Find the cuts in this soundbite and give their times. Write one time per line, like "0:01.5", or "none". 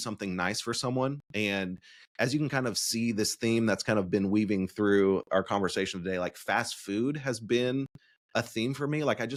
none